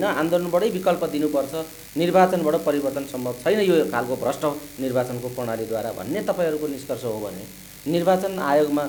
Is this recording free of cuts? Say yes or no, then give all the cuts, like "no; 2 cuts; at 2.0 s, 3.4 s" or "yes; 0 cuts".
yes; 0 cuts